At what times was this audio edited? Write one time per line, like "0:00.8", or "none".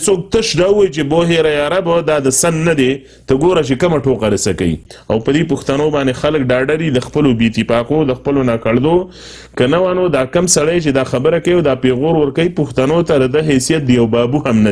0:04.9